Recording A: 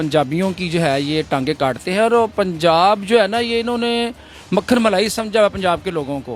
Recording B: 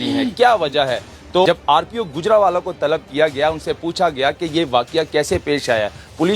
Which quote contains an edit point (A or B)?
B